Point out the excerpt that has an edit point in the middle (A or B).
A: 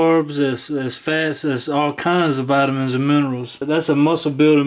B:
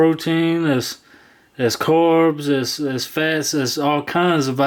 A